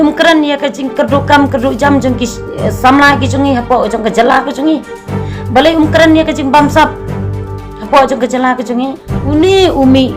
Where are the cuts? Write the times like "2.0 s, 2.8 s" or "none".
9.1 s